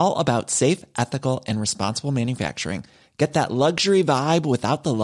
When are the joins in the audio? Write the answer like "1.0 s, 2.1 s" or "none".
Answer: none